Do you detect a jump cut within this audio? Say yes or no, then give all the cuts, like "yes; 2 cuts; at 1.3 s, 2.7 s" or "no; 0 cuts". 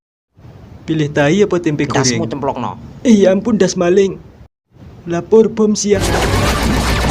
yes; 1 cut; at 6.0 s